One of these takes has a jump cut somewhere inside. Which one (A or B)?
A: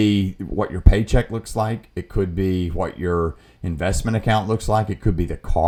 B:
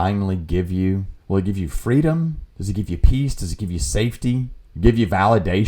B